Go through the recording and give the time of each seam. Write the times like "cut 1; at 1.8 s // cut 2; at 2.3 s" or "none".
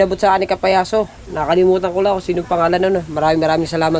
none